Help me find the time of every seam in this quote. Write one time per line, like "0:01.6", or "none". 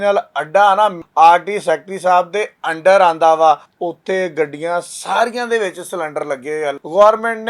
0:01.0
0:03.7
0:06.7